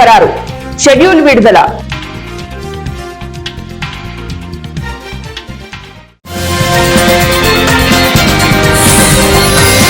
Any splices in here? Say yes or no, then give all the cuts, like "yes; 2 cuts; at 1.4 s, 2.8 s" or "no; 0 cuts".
no; 0 cuts